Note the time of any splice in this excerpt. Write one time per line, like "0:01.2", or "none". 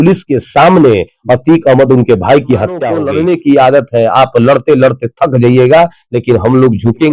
0:03.0